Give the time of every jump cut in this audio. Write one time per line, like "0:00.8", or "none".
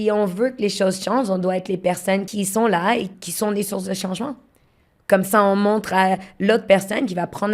0:02.3
0:03.2